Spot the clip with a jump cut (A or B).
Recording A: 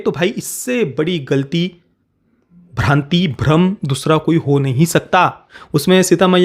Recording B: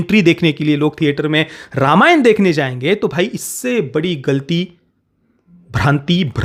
A